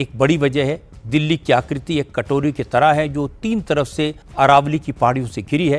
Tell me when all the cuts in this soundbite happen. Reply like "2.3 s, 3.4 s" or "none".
4.2 s